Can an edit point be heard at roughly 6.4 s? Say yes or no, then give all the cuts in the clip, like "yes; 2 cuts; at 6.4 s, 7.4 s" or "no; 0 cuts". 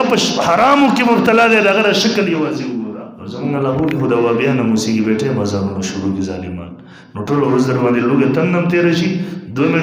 no; 1 cut; at 2.9 s